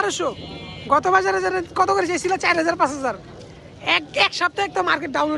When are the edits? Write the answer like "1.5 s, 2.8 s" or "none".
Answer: none

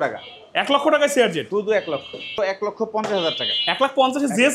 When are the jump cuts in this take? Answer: 2.3 s

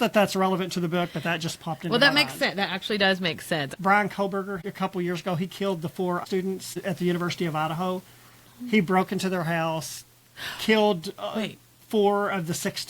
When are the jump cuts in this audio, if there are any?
3.7 s, 4.6 s, 6.2 s

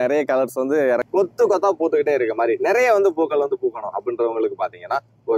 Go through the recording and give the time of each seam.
1.0 s

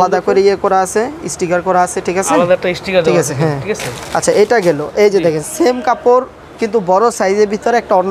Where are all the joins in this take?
none

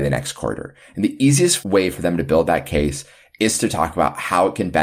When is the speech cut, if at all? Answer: none

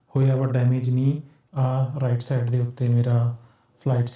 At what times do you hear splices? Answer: 1.3 s

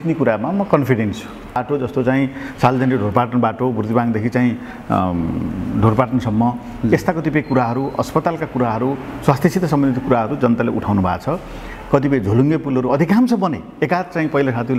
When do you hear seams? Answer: 1.6 s

